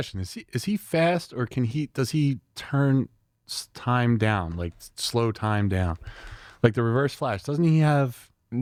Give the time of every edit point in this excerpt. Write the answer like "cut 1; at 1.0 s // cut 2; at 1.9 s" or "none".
none